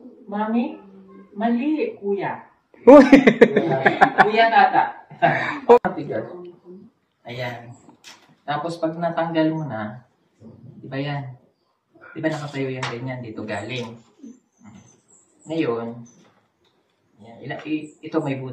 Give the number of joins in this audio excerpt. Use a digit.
1